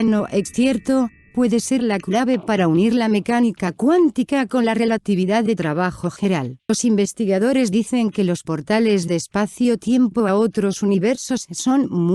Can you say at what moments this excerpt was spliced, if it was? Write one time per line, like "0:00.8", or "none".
0:06.7